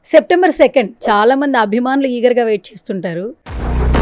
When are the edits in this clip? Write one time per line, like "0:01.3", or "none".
0:01.0